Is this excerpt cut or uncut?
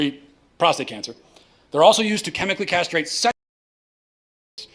uncut